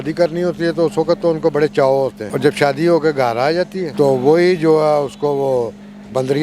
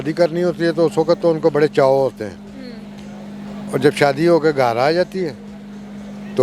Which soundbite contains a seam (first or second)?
first